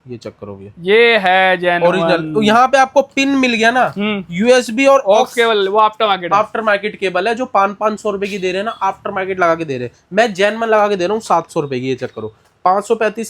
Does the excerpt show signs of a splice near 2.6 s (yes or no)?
no